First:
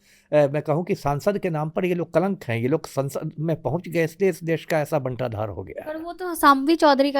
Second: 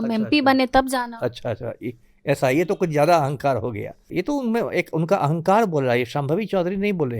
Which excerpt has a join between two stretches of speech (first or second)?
second